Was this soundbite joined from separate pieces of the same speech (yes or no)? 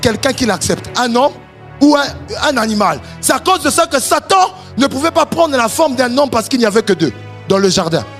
no